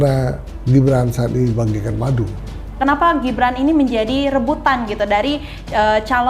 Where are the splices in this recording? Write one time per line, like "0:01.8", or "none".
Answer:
0:02.8